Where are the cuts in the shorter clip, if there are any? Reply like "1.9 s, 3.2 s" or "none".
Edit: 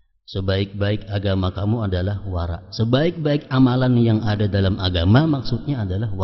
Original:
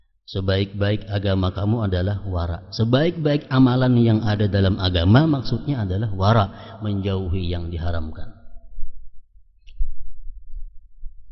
none